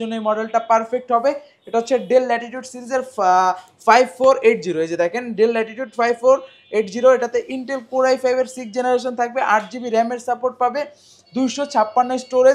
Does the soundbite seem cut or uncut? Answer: uncut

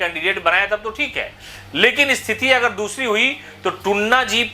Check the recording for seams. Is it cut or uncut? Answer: uncut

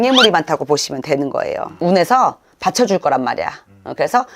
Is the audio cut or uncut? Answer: cut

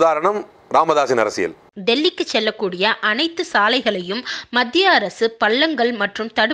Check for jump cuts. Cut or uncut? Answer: uncut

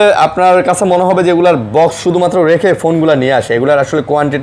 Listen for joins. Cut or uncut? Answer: uncut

